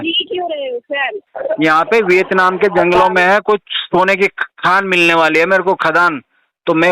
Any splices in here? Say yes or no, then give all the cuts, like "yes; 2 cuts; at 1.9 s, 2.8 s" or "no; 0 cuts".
yes; 1 cut; at 1.3 s